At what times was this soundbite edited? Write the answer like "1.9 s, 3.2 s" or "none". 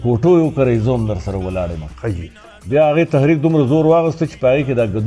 none